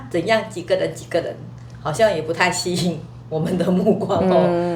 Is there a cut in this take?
no; 0 cuts

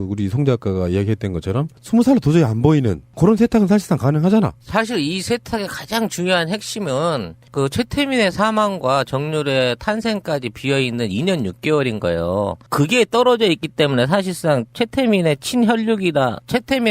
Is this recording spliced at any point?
yes; 1 cut; at 13.8 s

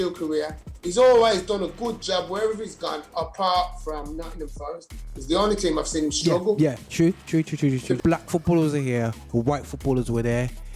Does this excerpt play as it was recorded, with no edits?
no; 1 cut; at 8.0 s

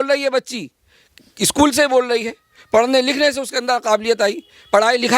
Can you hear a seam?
no; 0 cuts

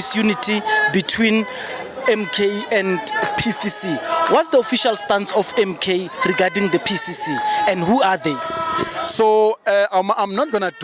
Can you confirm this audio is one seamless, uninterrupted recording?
yes; 0 cuts

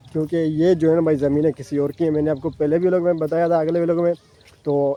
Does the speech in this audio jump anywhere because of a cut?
no; 0 cuts

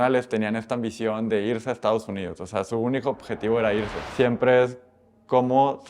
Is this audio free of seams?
no; 1 cut; at 4.0 s

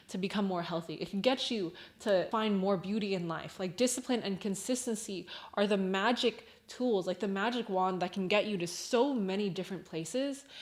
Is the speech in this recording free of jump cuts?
yes; 0 cuts

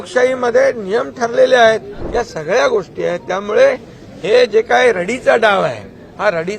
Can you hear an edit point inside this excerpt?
yes; 1 cut; at 2.0 s

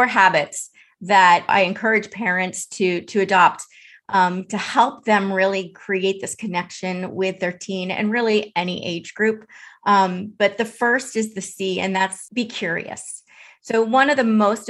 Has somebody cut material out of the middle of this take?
yes; 2 cuts; at 1.5 s, 12.2 s

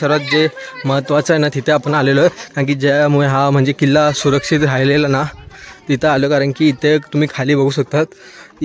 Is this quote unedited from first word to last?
yes; 0 cuts

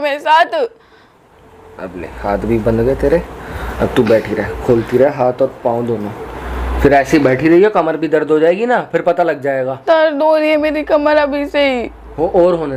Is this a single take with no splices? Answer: yes; 0 cuts

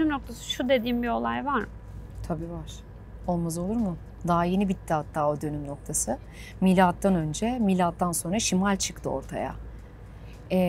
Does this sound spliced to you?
no; 0 cuts

